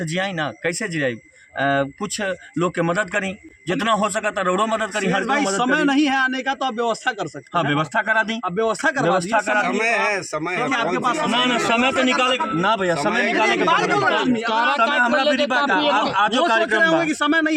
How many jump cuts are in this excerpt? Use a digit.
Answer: 0